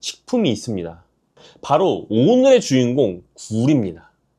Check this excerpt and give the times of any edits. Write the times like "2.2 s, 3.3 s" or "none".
none

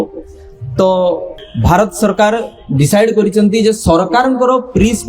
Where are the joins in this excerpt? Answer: 1.3 s

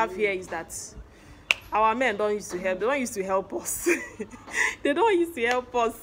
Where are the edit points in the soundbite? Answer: none

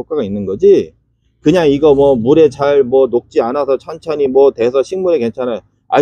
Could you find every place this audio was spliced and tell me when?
none

